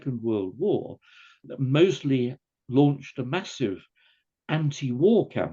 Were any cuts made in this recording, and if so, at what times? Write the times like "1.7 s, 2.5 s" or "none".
1.4 s